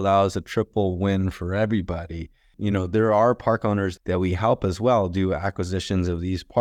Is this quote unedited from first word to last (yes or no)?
no